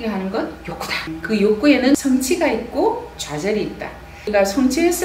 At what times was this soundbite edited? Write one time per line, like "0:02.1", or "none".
0:01.0
0:02.0
0:04.3